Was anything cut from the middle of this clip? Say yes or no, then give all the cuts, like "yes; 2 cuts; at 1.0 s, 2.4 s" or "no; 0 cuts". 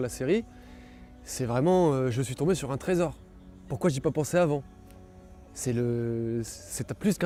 no; 0 cuts